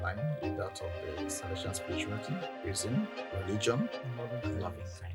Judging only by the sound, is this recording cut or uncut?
uncut